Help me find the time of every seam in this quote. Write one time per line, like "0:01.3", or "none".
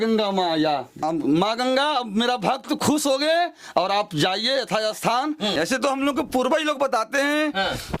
0:01.0
0:05.6

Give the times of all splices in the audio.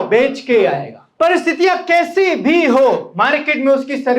0:01.0

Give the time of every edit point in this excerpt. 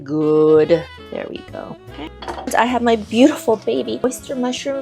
0:01.0
0:02.5

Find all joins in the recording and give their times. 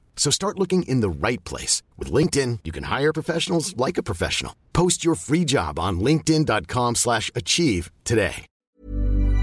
0:08.5

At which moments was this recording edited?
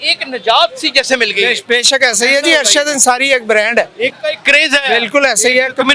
0:04.2

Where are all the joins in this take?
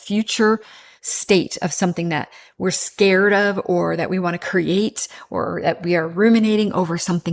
none

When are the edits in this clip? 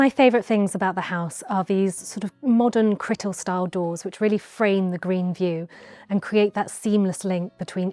none

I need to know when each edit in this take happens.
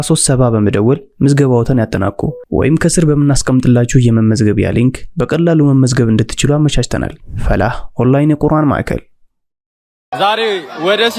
0:09.5

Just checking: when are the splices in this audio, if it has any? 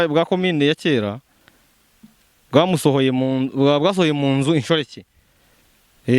none

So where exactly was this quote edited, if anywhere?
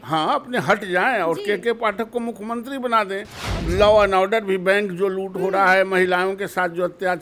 none

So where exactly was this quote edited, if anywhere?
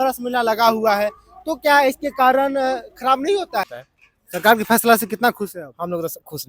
0:03.7

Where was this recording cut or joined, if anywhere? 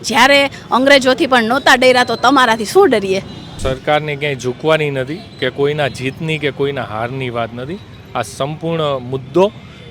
0:03.5

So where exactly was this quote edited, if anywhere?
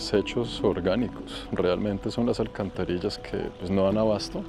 none

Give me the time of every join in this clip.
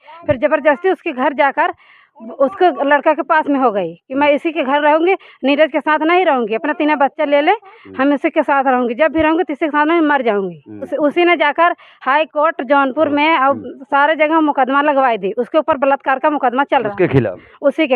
0:10.9

